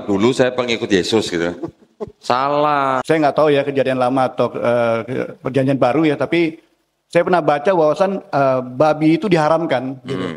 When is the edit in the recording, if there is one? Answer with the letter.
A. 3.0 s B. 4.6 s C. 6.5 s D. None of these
A